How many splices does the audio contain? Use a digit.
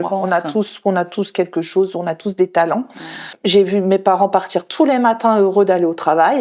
1